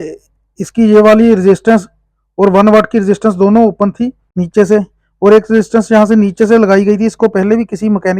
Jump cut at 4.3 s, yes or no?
yes